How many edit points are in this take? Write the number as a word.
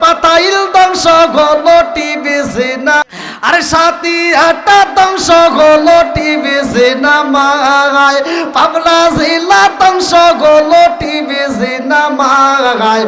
one